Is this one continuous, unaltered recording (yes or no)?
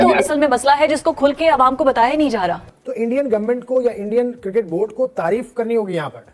no